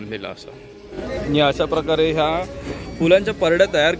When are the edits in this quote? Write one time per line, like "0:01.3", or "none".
0:01.1